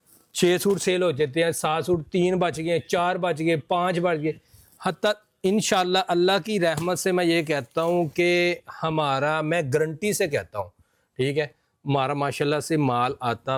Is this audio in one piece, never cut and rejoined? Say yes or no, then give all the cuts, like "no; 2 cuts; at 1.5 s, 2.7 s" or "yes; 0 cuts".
yes; 0 cuts